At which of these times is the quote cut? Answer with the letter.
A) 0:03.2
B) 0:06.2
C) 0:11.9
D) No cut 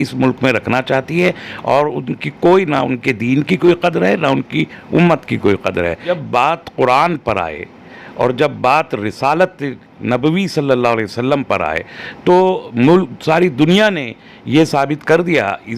B